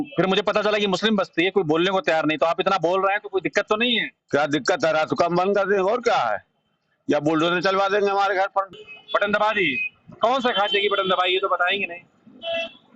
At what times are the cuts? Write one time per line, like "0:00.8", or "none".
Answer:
0:08.8